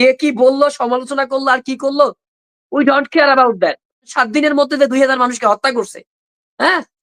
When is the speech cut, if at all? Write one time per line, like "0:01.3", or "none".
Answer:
0:04.1